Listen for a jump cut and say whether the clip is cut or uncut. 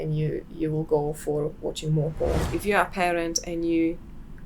cut